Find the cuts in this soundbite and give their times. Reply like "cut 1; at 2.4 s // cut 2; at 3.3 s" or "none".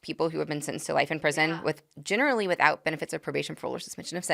none